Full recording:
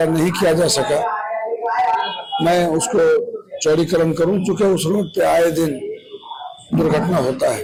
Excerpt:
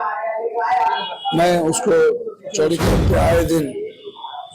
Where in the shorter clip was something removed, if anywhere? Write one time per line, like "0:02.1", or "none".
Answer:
0:02.8